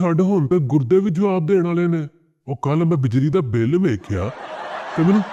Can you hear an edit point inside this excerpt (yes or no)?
no